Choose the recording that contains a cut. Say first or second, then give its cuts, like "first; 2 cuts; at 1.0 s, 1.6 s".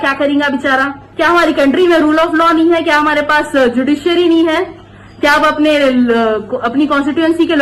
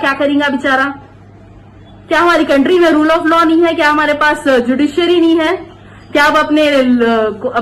first; 1 cut; at 1.0 s